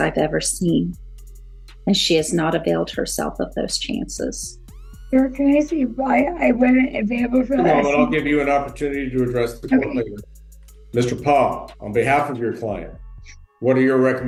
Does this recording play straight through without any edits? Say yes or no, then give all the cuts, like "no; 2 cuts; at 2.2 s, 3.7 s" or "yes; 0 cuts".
yes; 0 cuts